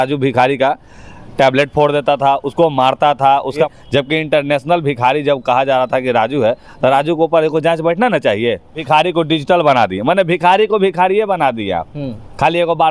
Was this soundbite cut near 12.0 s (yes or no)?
no